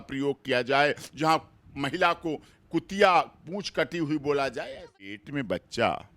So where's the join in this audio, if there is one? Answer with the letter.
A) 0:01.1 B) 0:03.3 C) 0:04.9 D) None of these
C